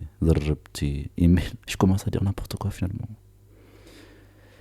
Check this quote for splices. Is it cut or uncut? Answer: cut